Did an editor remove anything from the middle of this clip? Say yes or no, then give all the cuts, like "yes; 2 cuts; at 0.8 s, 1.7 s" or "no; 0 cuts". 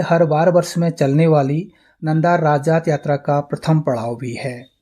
no; 0 cuts